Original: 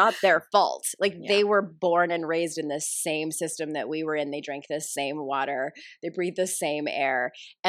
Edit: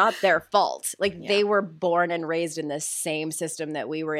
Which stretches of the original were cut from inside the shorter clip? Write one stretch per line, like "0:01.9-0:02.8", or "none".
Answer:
none